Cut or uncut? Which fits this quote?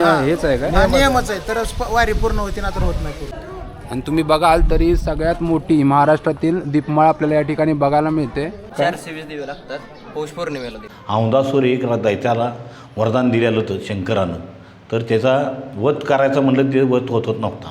cut